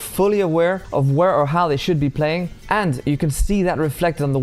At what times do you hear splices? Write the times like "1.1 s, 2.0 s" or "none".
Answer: 0.8 s, 2.5 s